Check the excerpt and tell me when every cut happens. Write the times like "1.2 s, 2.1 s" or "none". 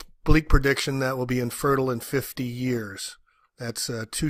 1.8 s